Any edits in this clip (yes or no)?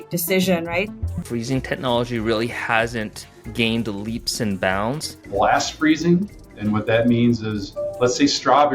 yes